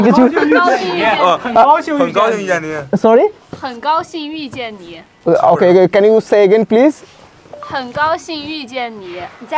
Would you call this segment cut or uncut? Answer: uncut